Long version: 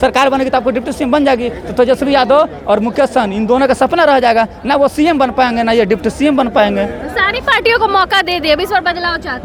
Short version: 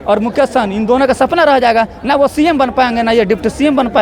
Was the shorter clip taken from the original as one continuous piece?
yes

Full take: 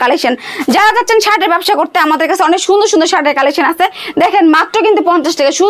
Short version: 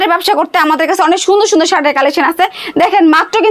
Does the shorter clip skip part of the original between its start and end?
no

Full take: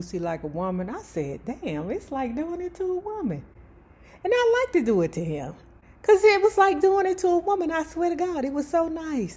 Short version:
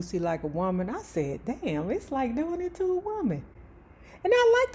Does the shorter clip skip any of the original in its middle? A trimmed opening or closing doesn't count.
no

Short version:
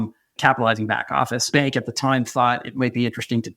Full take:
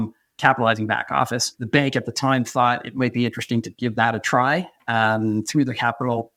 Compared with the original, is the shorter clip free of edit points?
no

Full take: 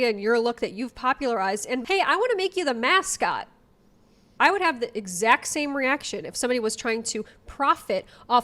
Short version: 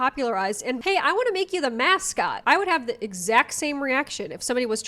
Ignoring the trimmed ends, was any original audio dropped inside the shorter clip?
yes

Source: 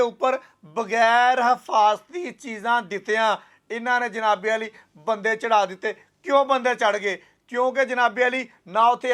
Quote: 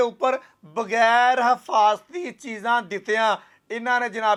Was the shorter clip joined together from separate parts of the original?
no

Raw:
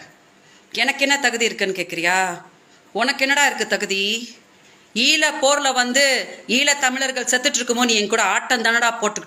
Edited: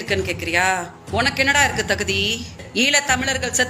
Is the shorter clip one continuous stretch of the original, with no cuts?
no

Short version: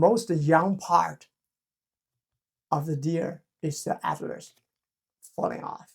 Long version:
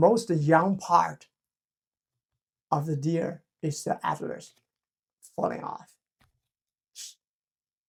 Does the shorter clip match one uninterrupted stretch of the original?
yes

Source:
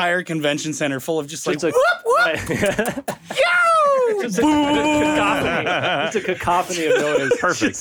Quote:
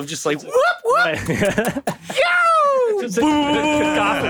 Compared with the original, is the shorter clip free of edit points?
yes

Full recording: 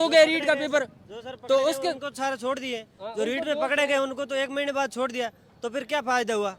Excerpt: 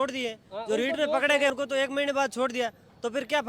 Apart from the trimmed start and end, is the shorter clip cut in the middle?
yes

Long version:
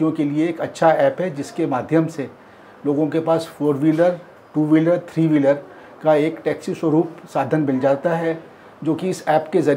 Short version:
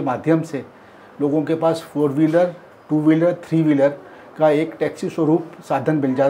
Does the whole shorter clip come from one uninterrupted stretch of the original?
yes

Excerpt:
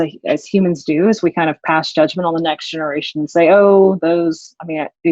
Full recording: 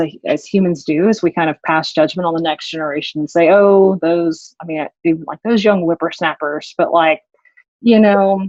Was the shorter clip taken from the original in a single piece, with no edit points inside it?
yes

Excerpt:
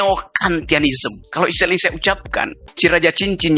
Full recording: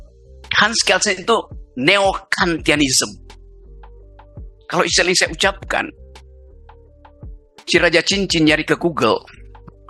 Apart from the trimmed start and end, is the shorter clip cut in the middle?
yes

